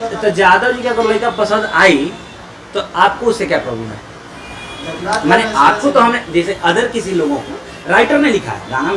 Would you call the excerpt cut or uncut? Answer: uncut